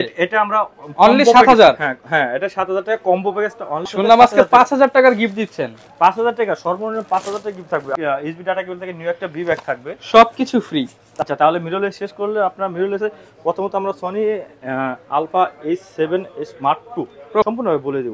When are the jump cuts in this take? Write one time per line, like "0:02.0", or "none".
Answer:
0:03.9
0:07.9
0:11.0
0:17.4